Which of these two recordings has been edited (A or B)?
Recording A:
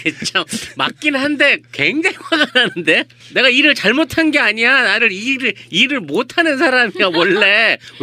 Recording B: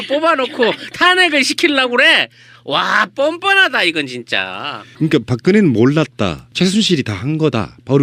B